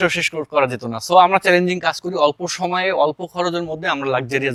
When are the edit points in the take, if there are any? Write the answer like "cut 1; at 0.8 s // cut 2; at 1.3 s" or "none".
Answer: none